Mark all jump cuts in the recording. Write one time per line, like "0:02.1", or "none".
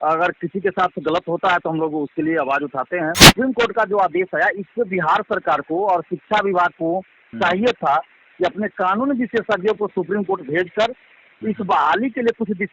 0:03.3